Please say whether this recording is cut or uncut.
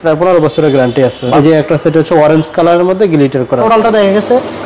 cut